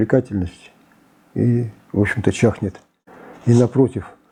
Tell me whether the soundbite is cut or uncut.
uncut